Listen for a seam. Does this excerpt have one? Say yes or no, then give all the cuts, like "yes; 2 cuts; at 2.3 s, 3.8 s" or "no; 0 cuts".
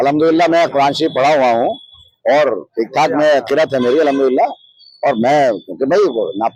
no; 0 cuts